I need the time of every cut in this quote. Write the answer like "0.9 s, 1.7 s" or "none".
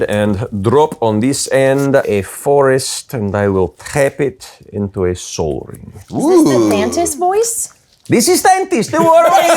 2.0 s